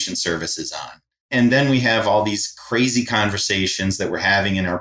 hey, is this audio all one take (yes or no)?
no